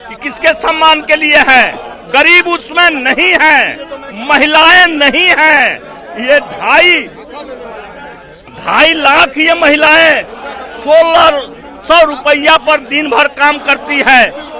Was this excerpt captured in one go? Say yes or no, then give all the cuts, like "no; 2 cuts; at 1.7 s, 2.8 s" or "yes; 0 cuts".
yes; 0 cuts